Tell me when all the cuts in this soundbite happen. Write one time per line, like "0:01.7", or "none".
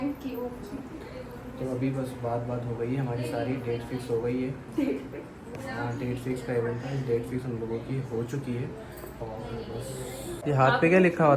0:10.4